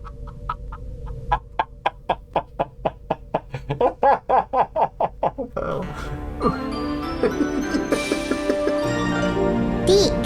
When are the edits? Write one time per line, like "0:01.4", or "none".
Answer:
0:05.5